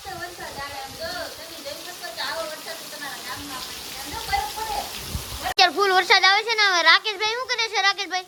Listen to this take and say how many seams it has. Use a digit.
0